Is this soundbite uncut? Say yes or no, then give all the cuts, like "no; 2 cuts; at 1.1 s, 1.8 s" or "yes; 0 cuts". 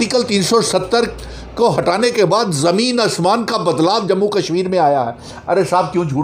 yes; 0 cuts